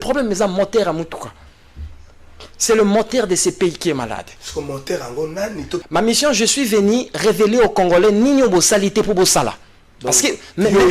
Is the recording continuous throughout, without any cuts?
no; 1 cut; at 5.8 s

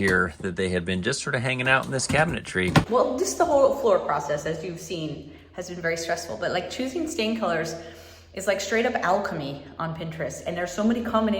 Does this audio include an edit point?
yes; 1 cut; at 2.9 s

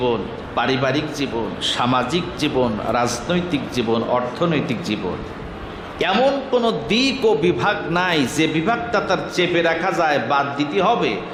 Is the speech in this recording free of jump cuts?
yes; 0 cuts

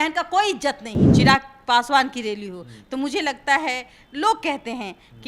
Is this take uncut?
no; 1 cut; at 1.1 s

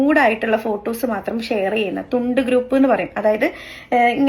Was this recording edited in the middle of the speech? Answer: no; 0 cuts

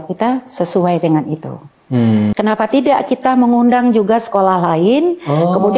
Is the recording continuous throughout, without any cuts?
no; 1 cut; at 2.3 s

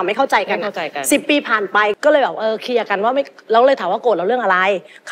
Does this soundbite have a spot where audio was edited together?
yes; 1 cut; at 1.9 s

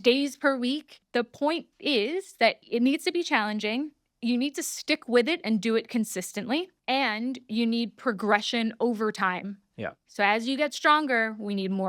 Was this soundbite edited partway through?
yes; 3 cuts; at 0.9 s, 2.6 s, 6.8 s

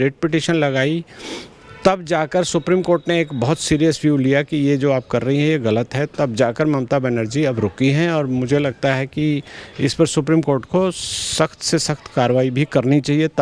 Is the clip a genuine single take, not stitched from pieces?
yes; 0 cuts

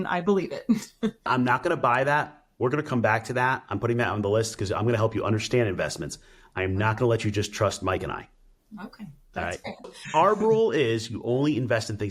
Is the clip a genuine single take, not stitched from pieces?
no; 2 cuts; at 1.2 s, 9.9 s

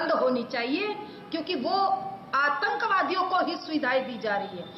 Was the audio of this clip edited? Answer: no; 0 cuts

